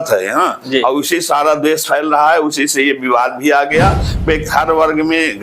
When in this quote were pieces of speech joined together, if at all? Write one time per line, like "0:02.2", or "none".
0:04.2